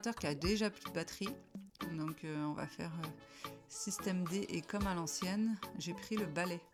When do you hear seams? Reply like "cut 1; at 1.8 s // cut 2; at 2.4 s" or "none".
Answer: none